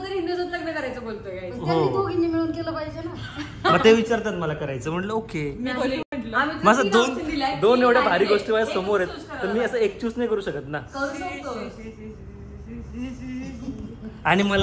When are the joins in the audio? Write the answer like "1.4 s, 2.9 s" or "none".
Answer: none